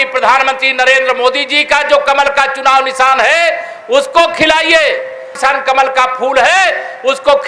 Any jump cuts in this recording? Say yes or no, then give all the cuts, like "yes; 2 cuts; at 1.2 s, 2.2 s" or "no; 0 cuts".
no; 0 cuts